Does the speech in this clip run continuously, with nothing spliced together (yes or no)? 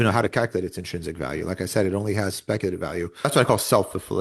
no